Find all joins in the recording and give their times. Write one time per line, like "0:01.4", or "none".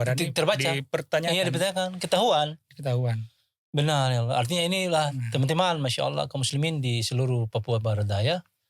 none